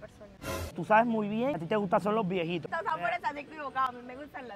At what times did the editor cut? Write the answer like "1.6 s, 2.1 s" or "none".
0.8 s, 2.7 s